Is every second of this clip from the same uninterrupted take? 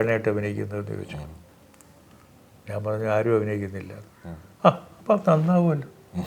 yes; 0 cuts

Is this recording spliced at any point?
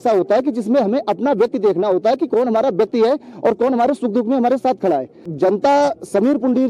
yes; 1 cut; at 5.2 s

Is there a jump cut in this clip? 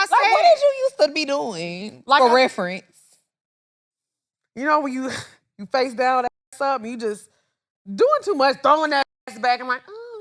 no; 0 cuts

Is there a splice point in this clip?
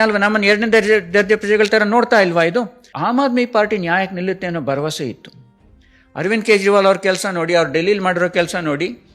yes; 1 cut; at 2.9 s

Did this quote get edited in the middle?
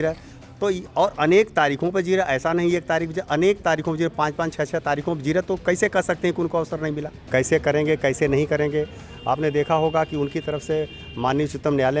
yes; 1 cut; at 7.1 s

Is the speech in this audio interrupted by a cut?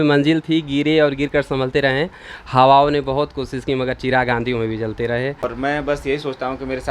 yes; 1 cut; at 5.4 s

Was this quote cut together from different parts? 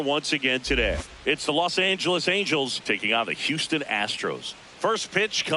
yes; 2 cuts; at 1.1 s, 4.6 s

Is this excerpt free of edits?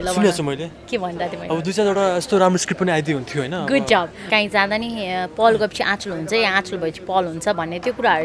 no; 1 cut; at 4.2 s

